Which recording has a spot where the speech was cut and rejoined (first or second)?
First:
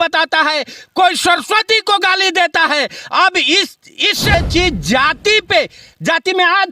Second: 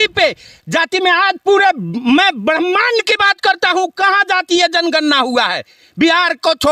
first